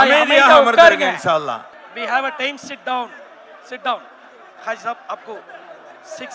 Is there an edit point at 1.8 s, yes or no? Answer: yes